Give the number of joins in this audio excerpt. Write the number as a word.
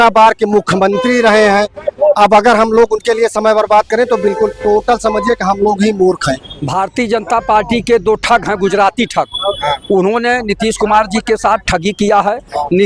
one